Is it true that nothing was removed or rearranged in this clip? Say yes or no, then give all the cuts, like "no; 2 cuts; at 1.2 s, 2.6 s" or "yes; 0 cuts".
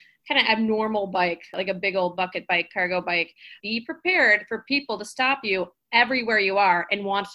no; 2 cuts; at 1.5 s, 3.5 s